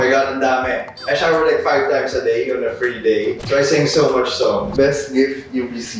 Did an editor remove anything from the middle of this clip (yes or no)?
yes